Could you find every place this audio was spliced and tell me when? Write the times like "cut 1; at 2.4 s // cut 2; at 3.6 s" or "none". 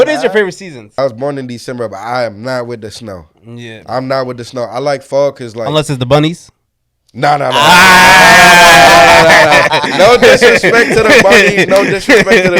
cut 1; at 0.9 s